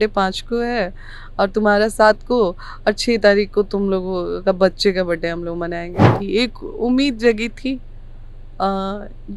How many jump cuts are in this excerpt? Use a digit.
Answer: 1